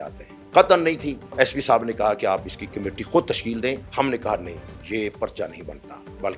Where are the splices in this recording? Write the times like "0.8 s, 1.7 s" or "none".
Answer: 1.3 s, 3.9 s